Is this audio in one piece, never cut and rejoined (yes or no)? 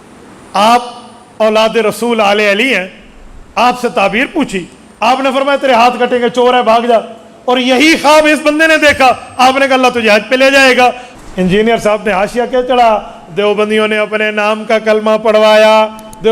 no